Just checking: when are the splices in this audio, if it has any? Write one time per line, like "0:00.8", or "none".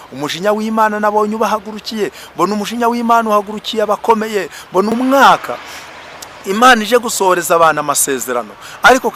0:04.9